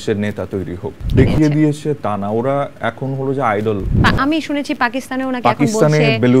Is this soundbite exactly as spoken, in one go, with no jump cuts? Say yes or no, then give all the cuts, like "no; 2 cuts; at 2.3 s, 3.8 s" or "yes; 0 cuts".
no; 2 cuts; at 1.1 s, 3.9 s